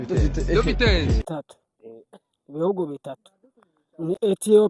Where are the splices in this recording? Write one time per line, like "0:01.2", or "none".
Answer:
0:01.3